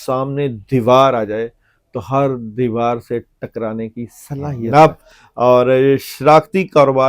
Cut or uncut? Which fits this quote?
cut